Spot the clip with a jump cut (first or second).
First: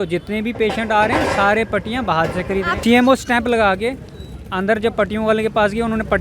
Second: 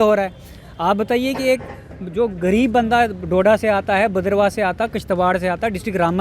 first